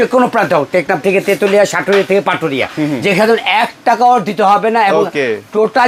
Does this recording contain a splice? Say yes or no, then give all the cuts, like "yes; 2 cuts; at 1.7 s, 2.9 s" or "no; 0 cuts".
no; 0 cuts